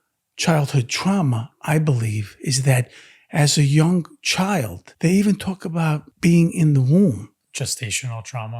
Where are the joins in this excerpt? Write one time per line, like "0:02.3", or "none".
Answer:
0:04.8
0:06.1
0:07.4